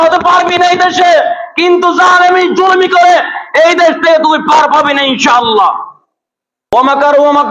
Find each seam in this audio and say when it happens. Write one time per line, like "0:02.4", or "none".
0:06.6